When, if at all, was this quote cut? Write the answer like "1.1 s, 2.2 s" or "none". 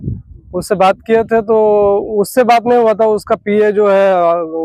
none